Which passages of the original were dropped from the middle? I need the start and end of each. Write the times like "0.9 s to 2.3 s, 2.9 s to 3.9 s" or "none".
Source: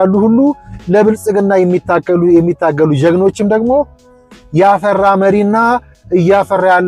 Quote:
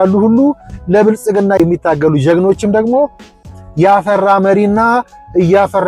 1.6 s to 2.4 s